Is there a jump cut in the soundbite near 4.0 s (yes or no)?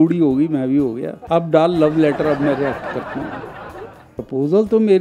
yes